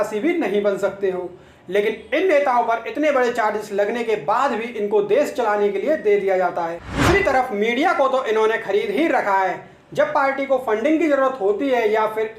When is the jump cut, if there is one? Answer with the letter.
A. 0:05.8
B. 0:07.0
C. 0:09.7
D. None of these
B